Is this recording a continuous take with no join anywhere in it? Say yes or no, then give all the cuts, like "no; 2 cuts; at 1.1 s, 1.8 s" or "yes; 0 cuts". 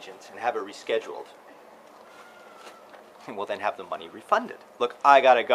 no; 2 cuts; at 1.6 s, 4.6 s